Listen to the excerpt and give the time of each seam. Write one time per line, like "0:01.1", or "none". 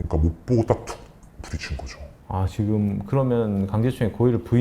none

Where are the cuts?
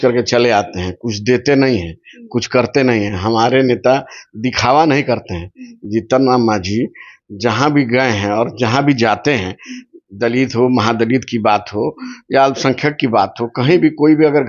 none

